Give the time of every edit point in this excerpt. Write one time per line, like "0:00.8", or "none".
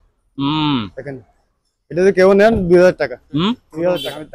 none